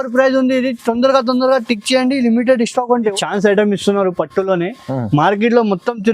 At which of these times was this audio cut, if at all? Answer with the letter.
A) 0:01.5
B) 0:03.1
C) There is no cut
B